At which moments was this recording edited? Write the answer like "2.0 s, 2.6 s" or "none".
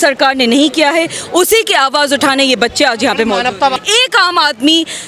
3.8 s